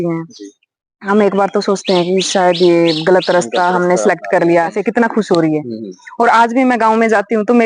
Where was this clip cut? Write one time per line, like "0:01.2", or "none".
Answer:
0:04.8